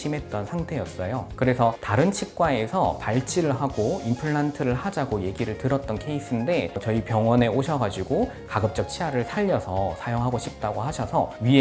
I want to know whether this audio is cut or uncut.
uncut